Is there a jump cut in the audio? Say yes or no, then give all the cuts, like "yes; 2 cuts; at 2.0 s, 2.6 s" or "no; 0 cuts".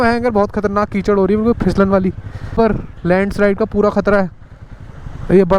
yes; 1 cut; at 2.5 s